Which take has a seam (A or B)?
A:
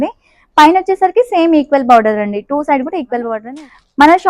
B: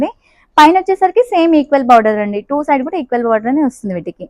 A